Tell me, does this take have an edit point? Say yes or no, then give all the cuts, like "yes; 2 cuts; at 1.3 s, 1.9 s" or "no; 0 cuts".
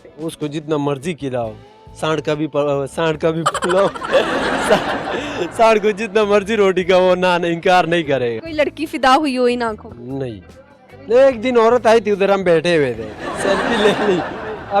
yes; 1 cut; at 8.4 s